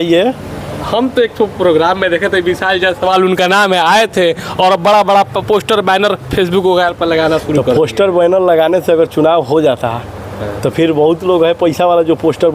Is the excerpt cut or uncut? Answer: uncut